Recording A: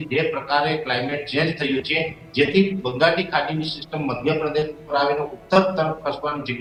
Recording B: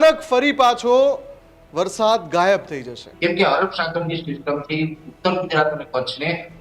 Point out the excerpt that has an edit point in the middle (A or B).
B